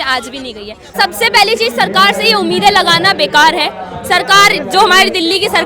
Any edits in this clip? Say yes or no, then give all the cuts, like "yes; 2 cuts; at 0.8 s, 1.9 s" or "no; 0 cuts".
yes; 1 cut; at 0.9 s